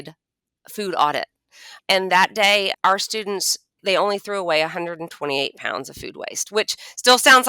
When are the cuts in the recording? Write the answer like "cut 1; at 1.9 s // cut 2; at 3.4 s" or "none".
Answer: cut 1; at 1.7 s // cut 2; at 2.7 s // cut 3; at 3.8 s